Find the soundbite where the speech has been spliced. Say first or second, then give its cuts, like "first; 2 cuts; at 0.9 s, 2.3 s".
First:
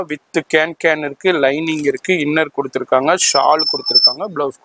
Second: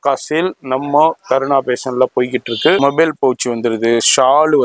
second; 1 cut; at 2.8 s